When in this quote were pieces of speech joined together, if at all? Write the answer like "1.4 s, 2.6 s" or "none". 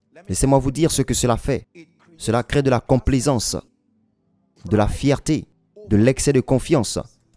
none